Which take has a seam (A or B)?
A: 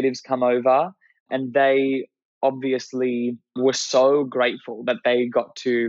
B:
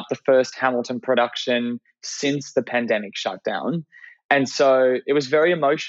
A